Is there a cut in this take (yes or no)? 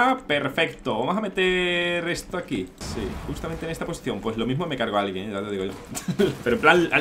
yes